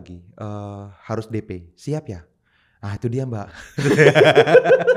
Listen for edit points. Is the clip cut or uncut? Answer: uncut